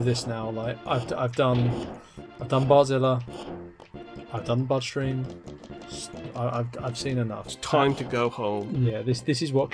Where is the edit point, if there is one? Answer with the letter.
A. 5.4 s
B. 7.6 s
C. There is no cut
B